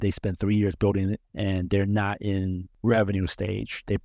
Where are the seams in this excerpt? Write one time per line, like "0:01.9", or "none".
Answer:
0:01.2
0:02.7

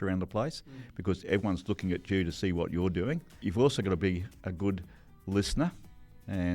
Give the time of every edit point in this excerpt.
0:03.4

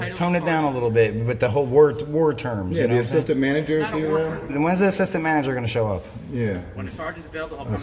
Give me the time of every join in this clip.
0:04.5

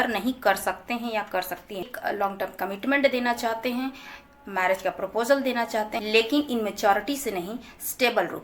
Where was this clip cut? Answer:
0:01.9
0:06.0

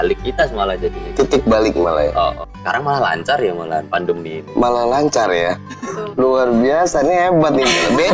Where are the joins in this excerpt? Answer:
0:02.5
0:05.8

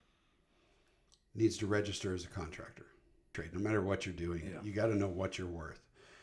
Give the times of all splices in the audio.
0:03.4

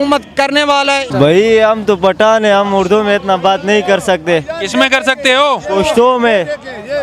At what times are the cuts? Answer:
none

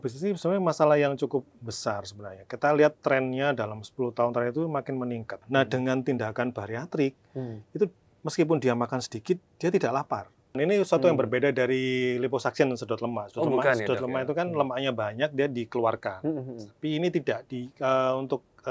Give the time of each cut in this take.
0:05.4
0:10.6

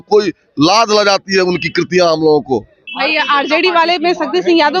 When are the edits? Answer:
0:02.8

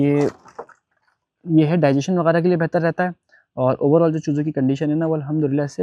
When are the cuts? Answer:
none

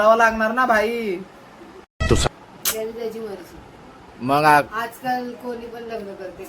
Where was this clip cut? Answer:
0:02.3

